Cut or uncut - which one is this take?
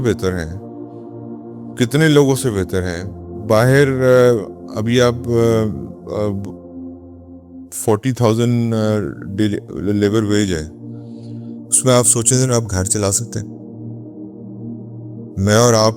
uncut